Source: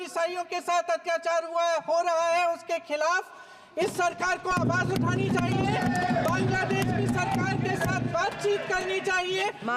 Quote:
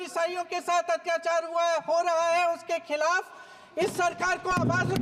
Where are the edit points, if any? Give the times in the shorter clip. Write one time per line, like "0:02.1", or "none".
none